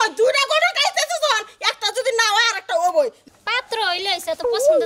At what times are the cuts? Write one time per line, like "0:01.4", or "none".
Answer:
0:03.3